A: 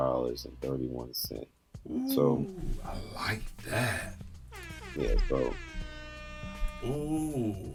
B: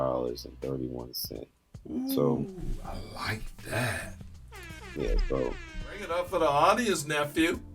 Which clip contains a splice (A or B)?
B